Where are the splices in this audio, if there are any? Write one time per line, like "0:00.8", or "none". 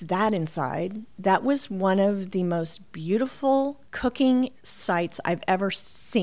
0:01.1
0:03.8
0:04.7